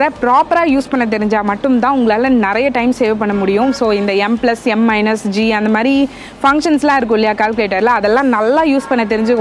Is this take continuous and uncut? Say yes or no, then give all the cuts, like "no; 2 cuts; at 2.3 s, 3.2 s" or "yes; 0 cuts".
yes; 0 cuts